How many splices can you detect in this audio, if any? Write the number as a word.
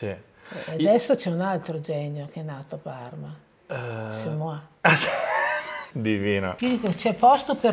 two